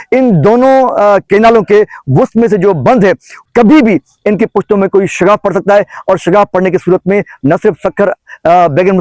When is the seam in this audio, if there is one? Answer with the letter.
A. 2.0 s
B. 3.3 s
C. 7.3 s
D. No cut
B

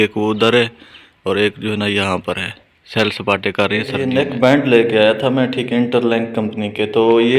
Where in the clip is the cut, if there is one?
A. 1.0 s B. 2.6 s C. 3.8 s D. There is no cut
D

